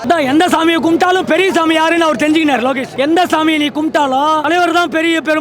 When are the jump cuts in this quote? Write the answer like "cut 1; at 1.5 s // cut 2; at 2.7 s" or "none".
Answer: cut 1; at 2.9 s // cut 2; at 4.4 s